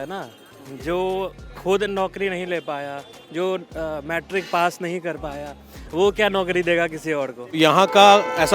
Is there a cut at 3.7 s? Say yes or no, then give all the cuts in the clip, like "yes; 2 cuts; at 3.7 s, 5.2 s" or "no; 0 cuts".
no; 1 cut; at 7.5 s